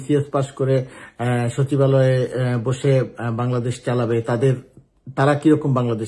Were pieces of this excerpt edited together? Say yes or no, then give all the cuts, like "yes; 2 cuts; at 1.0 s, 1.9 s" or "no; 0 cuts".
no; 0 cuts